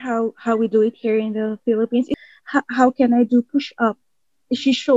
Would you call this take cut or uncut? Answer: cut